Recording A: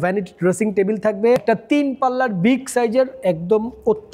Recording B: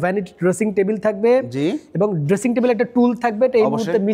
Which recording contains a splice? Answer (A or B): A